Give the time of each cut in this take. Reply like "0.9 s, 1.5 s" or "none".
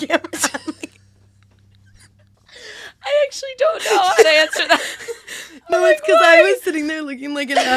2.3 s, 5.7 s